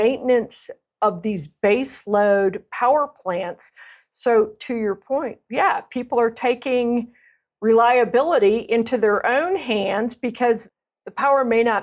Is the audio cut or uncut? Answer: cut